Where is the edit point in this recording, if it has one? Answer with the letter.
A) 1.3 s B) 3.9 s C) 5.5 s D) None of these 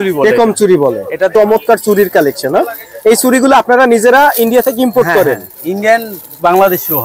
A